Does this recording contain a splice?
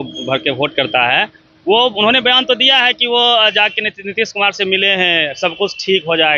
no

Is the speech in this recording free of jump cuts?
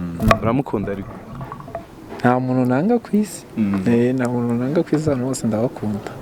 yes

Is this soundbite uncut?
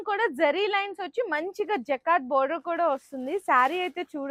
yes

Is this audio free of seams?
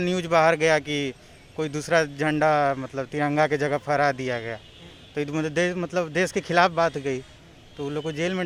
yes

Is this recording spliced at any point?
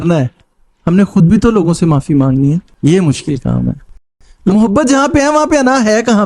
yes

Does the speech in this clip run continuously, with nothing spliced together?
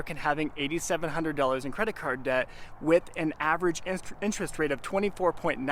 yes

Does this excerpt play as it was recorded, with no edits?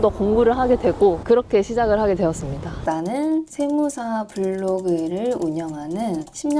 no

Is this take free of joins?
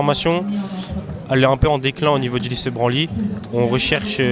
yes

